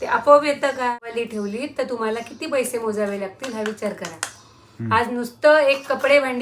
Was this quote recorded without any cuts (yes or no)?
no